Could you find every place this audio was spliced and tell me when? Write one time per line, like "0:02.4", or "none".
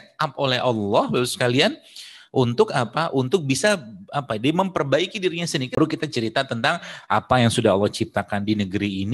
0:05.8

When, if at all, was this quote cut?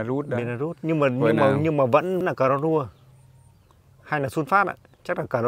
0:02.2

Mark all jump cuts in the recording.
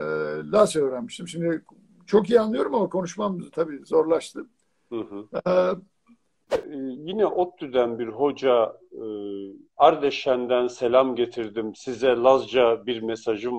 0:06.7

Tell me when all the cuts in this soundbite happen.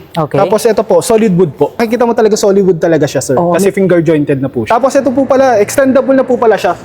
0:01.9
0:04.6

